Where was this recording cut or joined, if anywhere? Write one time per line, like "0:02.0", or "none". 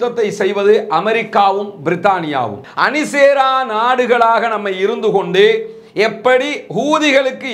0:02.6